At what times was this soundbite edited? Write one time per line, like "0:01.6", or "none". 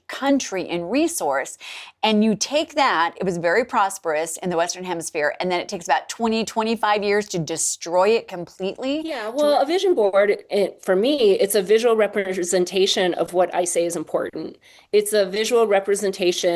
0:09.3